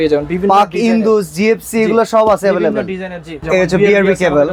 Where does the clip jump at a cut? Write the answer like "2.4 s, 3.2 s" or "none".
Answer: 3.3 s